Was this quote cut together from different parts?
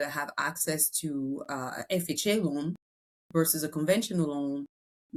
no; 0 cuts

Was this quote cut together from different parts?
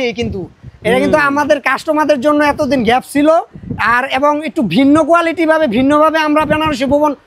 no; 0 cuts

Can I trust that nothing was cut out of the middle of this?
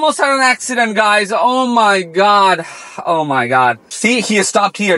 no; 1 cut; at 3.9 s

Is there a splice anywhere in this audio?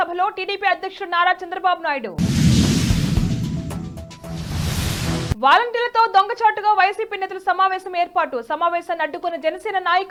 no; 0 cuts

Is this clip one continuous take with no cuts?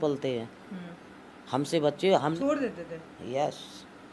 no; 1 cut; at 2.3 s

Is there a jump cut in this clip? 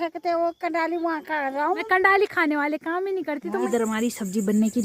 yes; 2 cuts; at 1.8 s, 3.7 s

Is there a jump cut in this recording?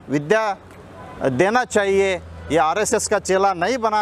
no; 0 cuts

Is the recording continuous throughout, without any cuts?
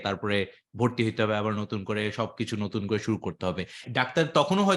no; 1 cut; at 3.8 s

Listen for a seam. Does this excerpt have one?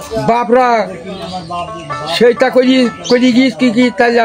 no; 0 cuts

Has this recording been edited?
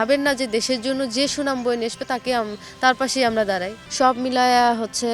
yes; 1 cut; at 3.8 s

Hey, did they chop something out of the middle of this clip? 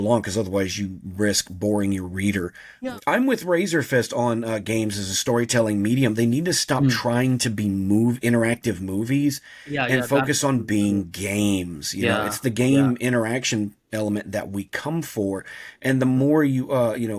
yes; 1 cut; at 2.6 s

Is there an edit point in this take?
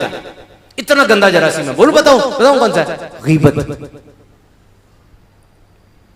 no; 0 cuts

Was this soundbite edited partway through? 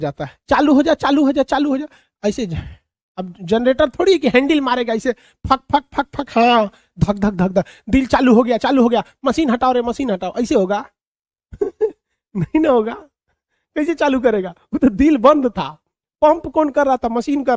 no; 0 cuts

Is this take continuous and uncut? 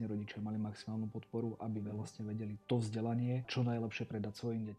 no; 2 cuts; at 2.6 s, 3.5 s

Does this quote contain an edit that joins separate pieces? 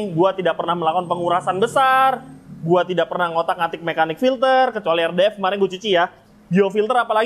no; 0 cuts

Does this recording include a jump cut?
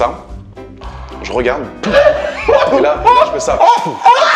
no; 0 cuts

